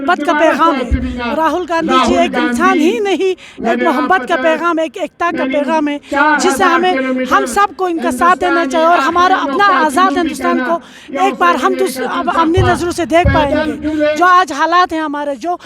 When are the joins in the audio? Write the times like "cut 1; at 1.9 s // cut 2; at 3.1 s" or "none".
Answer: none